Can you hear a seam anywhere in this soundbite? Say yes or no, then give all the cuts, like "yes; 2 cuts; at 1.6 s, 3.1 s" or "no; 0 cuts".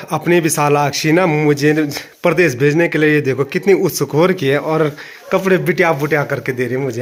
no; 0 cuts